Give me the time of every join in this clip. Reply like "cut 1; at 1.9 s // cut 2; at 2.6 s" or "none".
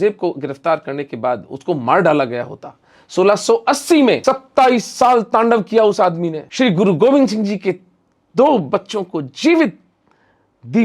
cut 1; at 4.2 s // cut 2; at 6.4 s